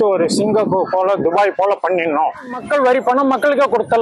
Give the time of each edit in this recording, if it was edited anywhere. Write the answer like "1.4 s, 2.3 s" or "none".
2.6 s